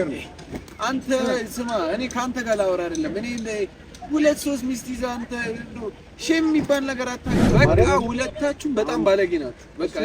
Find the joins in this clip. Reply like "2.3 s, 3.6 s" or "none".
7.5 s